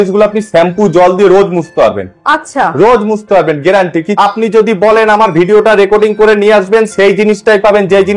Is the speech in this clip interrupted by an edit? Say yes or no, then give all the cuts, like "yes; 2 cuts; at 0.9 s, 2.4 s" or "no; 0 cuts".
yes; 1 cut; at 4.1 s